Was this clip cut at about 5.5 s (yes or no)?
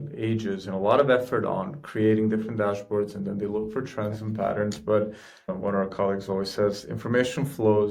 yes